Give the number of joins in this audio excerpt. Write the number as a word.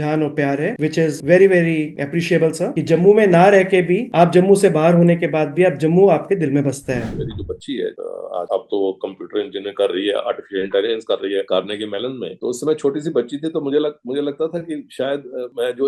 two